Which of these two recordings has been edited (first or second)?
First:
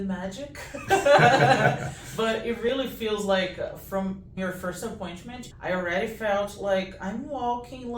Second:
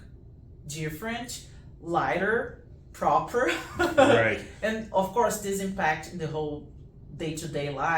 first